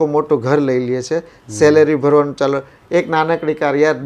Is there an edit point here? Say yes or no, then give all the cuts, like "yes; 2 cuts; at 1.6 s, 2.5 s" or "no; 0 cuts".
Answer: no; 0 cuts